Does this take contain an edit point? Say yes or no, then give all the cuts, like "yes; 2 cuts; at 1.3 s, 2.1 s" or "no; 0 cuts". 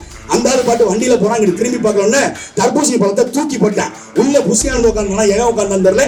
no; 0 cuts